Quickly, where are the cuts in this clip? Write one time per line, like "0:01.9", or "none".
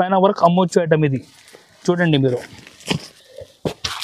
0:03.1